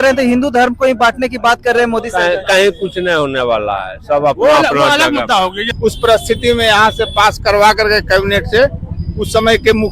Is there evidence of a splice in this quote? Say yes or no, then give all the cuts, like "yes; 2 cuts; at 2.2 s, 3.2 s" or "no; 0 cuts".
yes; 1 cut; at 5.6 s